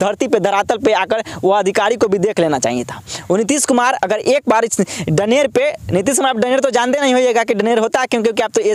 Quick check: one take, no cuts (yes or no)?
yes